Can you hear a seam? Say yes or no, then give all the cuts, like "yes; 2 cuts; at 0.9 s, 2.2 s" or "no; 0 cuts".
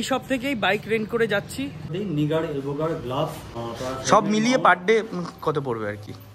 yes; 2 cuts; at 1.9 s, 3.5 s